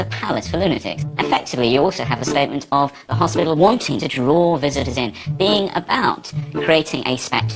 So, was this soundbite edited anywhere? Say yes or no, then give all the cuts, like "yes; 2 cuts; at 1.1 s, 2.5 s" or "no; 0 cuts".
no; 0 cuts